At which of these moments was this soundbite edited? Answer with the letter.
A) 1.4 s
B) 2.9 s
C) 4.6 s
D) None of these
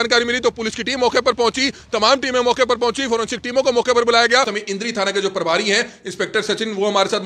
C